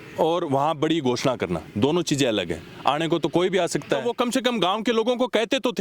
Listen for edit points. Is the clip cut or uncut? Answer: cut